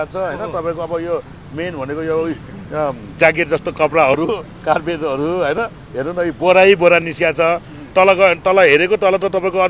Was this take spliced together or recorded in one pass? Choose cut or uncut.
uncut